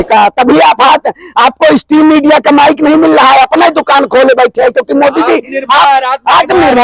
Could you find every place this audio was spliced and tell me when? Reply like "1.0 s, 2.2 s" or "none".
none